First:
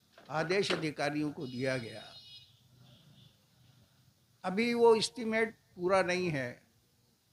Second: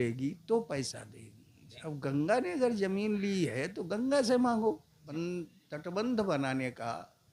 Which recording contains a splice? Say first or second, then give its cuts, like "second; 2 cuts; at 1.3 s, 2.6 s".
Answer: second; 1 cut; at 5.0 s